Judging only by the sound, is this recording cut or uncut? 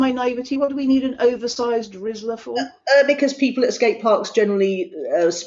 uncut